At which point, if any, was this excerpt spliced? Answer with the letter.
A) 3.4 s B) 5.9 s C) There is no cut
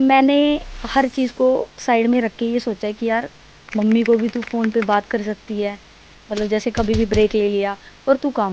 C